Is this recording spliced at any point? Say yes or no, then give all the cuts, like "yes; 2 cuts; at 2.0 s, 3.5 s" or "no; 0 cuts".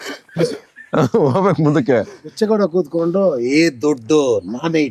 no; 0 cuts